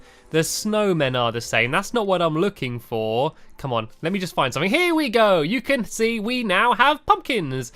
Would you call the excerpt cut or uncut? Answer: cut